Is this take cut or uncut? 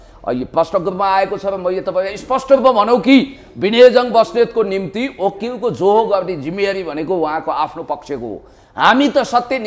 uncut